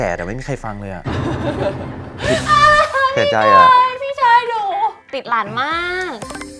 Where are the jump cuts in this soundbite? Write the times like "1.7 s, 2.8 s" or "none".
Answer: 5.0 s